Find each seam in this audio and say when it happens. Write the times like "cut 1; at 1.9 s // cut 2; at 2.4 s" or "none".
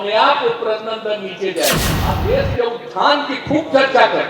cut 1; at 1.9 s